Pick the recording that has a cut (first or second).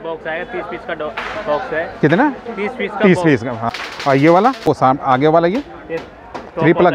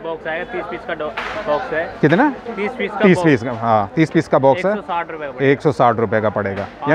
first